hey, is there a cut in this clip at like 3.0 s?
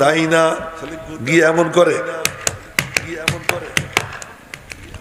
no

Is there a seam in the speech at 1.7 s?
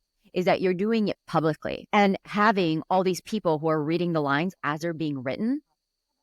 yes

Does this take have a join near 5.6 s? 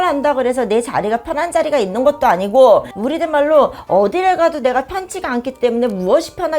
no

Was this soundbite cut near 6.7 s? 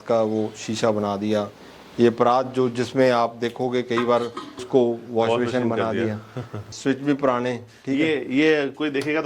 yes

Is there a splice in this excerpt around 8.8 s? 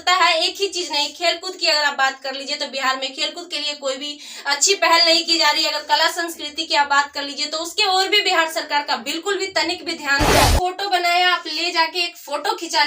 no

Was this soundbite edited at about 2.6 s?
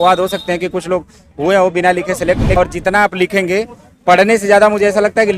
yes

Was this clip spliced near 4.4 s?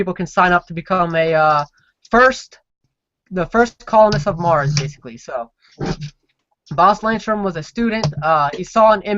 yes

